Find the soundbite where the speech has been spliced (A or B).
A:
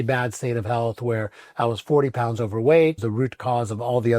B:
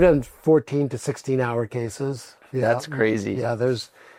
A